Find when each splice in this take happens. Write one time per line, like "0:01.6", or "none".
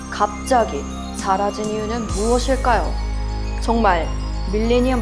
none